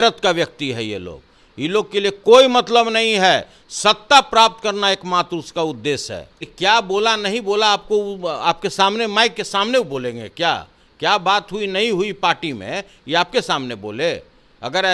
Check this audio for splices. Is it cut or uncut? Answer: cut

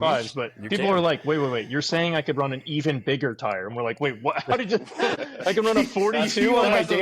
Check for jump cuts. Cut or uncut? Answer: cut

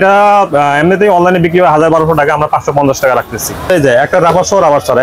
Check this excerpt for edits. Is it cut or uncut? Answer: cut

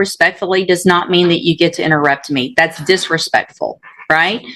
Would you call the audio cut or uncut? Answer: uncut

